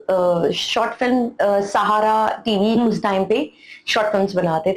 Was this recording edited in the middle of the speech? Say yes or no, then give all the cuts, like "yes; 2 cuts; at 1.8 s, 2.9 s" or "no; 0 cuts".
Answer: no; 0 cuts